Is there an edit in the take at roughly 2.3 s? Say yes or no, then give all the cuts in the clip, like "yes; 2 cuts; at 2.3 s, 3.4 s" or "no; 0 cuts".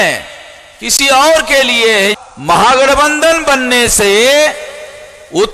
yes; 1 cut; at 2.3 s